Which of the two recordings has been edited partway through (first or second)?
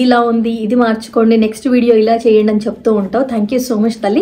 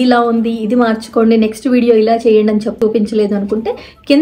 second